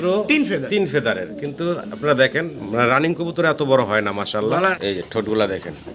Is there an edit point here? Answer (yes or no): yes